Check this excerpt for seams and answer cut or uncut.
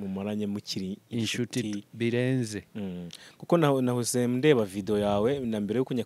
uncut